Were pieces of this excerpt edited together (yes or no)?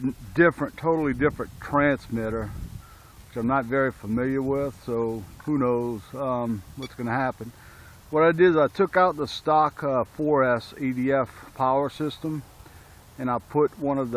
no